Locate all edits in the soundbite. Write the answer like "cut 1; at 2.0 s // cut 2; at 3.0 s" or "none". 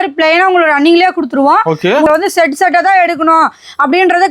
cut 1; at 2.1 s